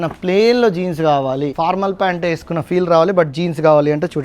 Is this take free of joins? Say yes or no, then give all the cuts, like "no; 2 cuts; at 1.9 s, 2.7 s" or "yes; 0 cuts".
no; 1 cut; at 1.5 s